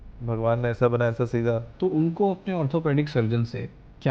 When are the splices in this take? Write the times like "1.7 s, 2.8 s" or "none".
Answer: 1.7 s